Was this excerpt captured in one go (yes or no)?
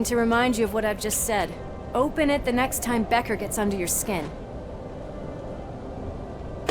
no